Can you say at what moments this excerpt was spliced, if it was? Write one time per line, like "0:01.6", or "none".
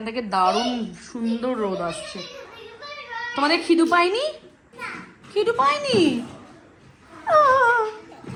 none